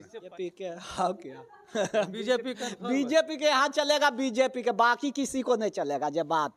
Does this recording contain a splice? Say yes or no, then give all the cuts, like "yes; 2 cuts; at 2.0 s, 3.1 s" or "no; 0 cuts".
no; 0 cuts